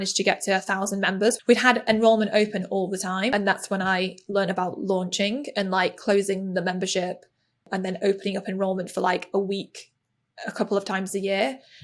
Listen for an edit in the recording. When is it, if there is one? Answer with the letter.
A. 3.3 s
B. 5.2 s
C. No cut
A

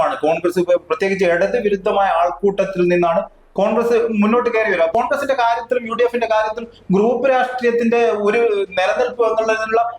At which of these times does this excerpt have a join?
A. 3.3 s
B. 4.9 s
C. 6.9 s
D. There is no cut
B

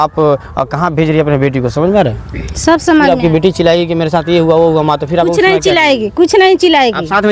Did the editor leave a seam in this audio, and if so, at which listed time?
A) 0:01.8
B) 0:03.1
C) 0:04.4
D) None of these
B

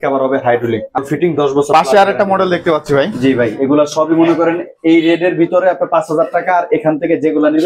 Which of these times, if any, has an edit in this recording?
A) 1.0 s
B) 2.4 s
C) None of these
A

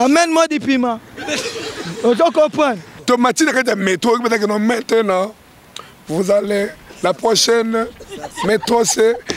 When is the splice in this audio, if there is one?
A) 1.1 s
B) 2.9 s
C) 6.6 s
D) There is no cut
B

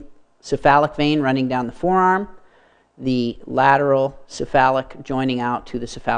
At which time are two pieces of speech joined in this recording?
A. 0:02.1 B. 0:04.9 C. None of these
A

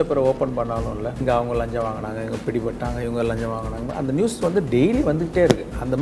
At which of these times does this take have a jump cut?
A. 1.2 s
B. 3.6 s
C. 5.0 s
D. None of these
A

